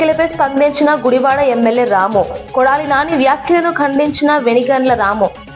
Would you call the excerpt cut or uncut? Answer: uncut